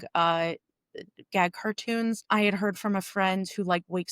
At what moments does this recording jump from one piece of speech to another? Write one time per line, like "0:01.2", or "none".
0:02.2

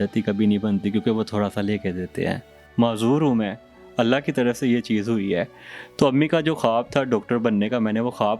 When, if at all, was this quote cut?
0:02.6

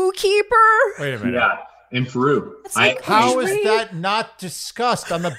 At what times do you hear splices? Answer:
0:02.6

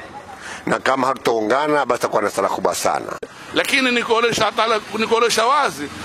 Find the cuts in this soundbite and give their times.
0:03.4

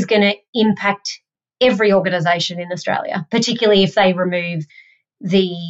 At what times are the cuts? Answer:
none

